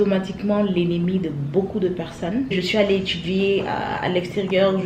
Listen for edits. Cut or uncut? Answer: cut